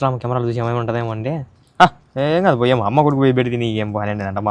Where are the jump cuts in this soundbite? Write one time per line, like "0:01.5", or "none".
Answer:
none